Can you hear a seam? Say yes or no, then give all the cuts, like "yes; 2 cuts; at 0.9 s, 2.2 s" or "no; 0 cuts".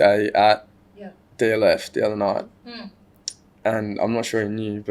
no; 0 cuts